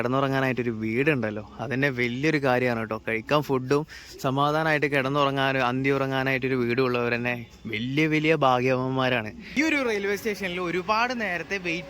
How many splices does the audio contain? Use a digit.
1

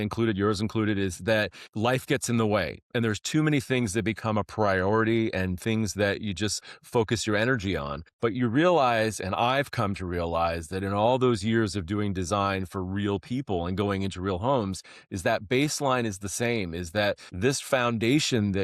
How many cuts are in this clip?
3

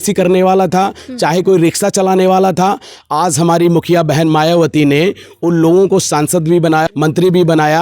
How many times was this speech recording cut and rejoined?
1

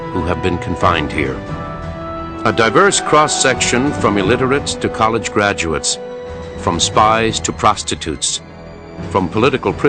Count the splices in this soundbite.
1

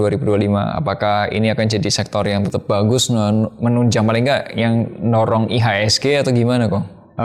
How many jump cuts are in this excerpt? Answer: 1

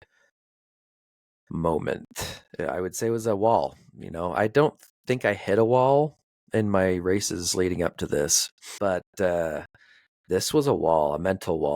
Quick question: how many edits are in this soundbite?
1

